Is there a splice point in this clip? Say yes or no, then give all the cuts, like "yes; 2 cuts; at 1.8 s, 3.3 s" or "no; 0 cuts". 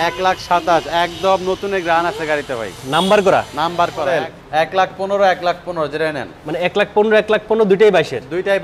yes; 1 cut; at 4.1 s